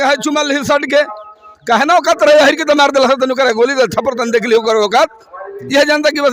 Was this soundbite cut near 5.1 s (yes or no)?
no